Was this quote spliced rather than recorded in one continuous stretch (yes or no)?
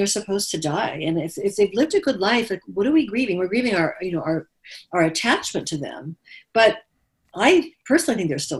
no